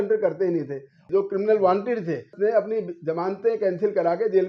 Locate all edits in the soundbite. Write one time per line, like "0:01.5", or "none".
0:01.0
0:02.3